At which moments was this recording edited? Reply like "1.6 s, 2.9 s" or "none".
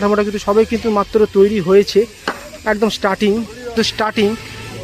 3.7 s